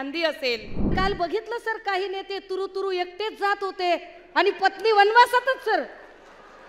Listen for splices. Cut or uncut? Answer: cut